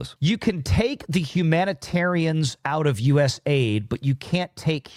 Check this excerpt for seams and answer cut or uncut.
uncut